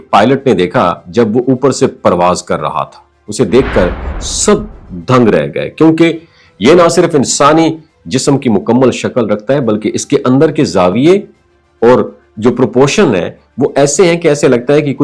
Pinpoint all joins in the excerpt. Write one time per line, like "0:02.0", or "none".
none